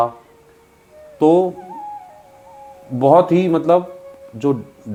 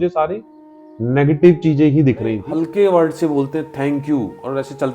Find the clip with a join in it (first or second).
second